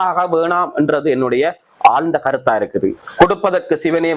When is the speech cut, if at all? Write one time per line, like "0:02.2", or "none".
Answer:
0:03.0